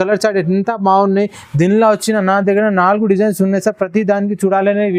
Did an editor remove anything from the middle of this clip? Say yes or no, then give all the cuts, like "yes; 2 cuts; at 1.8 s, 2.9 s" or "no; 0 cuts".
no; 0 cuts